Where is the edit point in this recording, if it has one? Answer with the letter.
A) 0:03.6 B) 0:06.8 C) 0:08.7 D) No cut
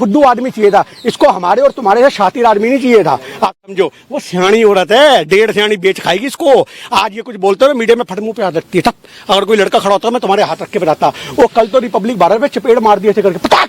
A